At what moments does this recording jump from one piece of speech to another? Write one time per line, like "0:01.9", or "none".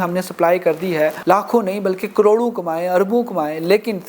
0:01.2